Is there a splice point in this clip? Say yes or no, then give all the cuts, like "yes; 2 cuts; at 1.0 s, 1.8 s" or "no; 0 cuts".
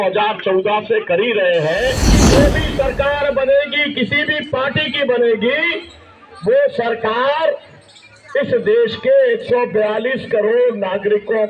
yes; 1 cut; at 2.3 s